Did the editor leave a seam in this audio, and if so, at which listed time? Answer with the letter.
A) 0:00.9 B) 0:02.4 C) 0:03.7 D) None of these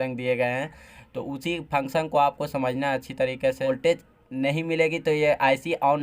C